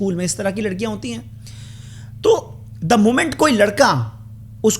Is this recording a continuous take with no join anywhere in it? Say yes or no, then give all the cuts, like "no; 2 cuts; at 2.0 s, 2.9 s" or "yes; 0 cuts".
yes; 0 cuts